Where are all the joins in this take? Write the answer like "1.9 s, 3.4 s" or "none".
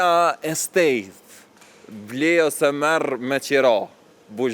none